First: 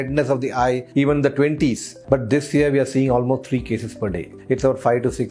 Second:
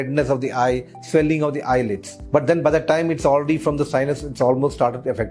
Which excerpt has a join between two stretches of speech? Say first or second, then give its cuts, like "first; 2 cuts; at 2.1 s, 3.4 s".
first; 3 cuts; at 0.8 s, 1.9 s, 4.3 s